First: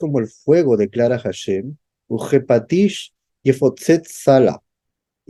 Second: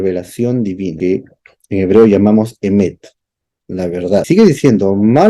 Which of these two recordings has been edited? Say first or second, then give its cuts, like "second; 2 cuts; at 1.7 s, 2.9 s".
second; 2 cuts; at 0.9 s, 4.3 s